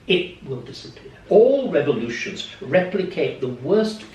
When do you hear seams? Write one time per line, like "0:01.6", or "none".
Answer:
0:01.2